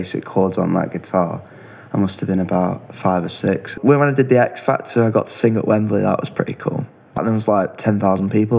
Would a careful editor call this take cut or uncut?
cut